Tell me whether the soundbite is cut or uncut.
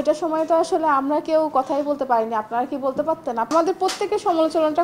uncut